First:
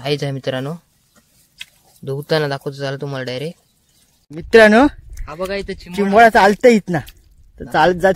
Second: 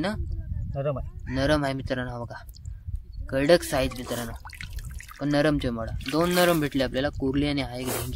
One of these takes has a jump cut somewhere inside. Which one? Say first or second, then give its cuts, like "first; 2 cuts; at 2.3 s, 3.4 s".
first; 1 cut; at 4.2 s